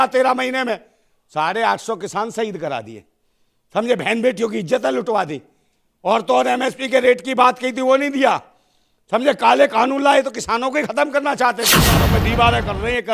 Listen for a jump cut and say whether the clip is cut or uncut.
cut